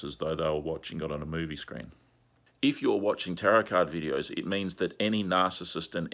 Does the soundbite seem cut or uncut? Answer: cut